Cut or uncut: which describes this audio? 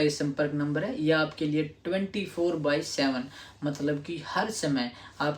uncut